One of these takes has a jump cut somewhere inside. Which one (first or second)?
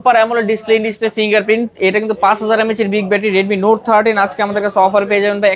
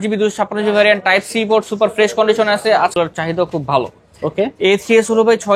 second